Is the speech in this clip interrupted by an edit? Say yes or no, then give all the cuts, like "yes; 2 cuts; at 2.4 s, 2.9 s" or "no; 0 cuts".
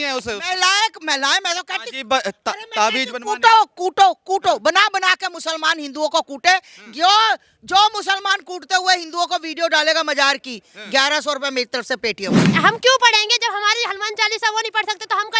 yes; 1 cut; at 12.4 s